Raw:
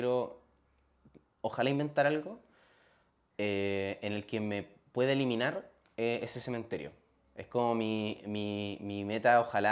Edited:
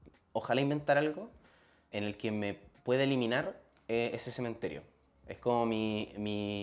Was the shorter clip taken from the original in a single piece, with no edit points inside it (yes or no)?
no